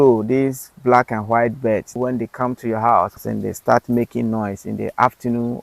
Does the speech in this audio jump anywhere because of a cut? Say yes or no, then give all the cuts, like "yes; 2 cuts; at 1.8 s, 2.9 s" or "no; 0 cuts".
yes; 2 cuts; at 2.0 s, 3.2 s